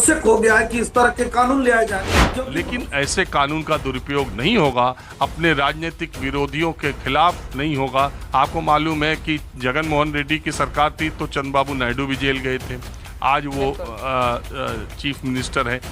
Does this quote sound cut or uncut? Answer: cut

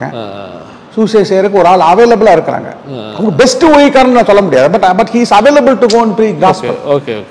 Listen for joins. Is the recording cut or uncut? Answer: uncut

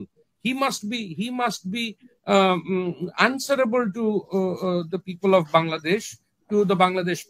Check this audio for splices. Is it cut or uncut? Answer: uncut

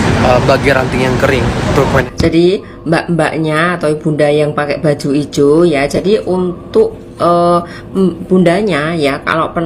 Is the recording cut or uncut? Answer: cut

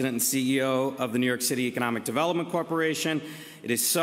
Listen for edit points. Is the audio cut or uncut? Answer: uncut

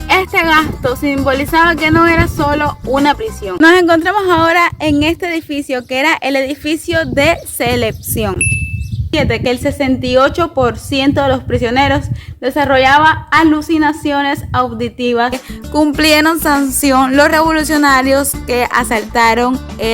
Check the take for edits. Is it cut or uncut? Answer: cut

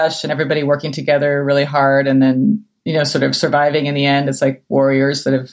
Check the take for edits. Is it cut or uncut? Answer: uncut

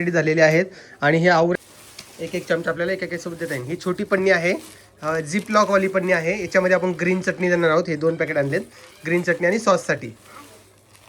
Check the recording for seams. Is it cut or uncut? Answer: cut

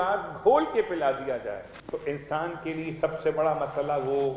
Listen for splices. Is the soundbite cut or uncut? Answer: cut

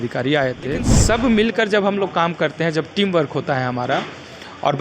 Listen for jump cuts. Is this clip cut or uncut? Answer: cut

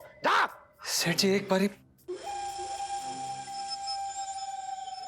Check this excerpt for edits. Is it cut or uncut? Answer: cut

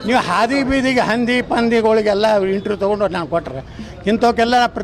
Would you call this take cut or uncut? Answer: uncut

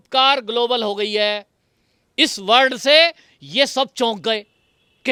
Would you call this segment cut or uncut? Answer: uncut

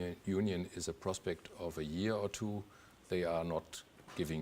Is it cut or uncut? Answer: uncut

